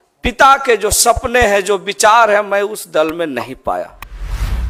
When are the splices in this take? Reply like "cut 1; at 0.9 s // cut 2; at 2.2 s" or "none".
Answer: none